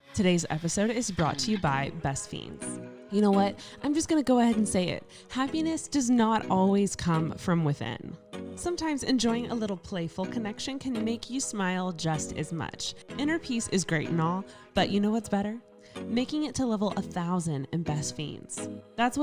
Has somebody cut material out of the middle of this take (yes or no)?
no